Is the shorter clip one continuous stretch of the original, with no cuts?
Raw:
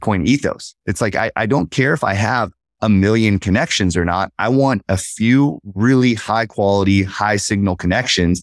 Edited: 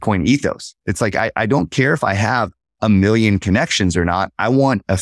yes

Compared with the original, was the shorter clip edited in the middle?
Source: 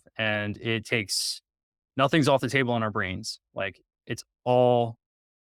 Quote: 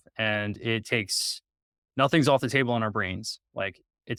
no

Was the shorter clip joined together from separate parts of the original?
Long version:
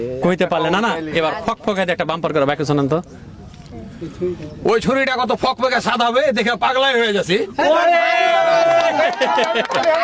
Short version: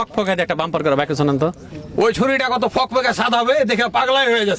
yes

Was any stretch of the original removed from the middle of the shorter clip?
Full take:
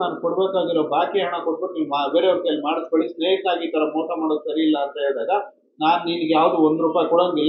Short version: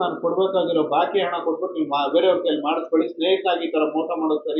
no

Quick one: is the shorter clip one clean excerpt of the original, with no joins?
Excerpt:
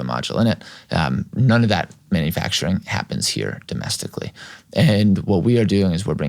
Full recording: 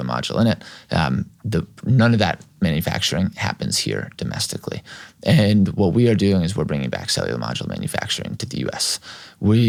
no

